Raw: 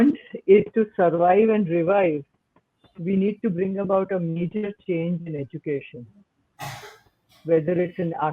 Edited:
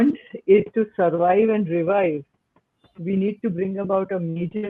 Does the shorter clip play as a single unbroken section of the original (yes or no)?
yes